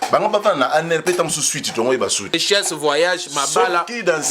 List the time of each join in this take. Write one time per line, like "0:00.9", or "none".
0:02.3